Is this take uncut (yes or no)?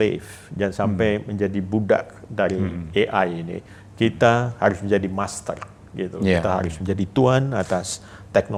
yes